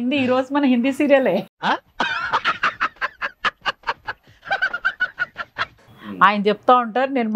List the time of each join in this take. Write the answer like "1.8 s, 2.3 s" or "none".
5.8 s